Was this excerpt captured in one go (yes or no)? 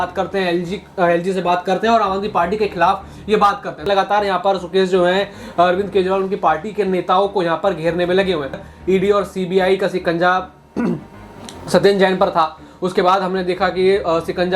no